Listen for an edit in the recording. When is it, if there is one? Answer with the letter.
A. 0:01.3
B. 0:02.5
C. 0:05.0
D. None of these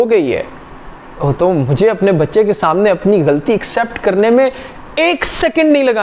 D